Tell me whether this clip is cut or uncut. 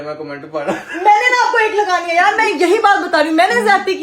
uncut